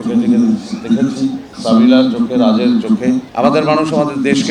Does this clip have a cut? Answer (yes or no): yes